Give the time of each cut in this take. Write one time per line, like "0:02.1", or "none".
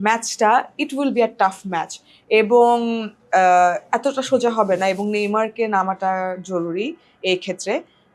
none